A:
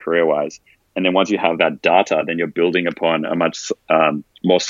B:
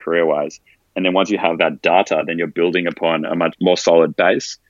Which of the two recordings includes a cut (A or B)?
B